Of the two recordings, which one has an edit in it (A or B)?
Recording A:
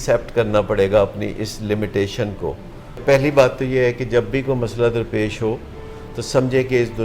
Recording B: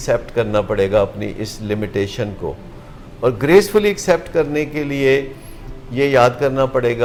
A